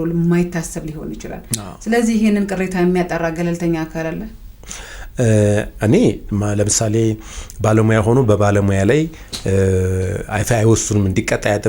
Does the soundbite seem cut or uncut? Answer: uncut